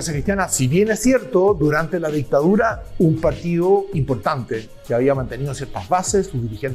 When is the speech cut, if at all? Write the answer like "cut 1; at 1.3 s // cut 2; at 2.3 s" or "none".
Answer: none

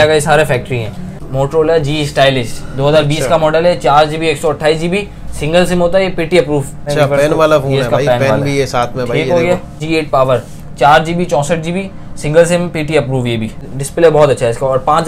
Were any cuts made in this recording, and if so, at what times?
cut 1; at 1.2 s // cut 2; at 6.8 s // cut 3; at 9.8 s // cut 4; at 13.7 s

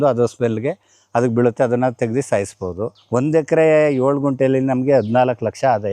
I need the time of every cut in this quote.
cut 1; at 3.0 s

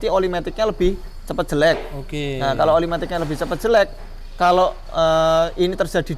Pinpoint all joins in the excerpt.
none

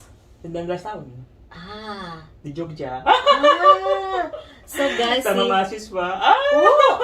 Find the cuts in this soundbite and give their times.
cut 1; at 4.5 s // cut 2; at 6.3 s

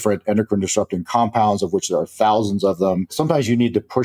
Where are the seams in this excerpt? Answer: cut 1; at 3.1 s

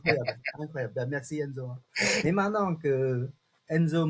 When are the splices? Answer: cut 1; at 1.8 s

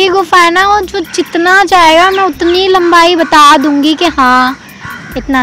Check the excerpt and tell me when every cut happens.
none

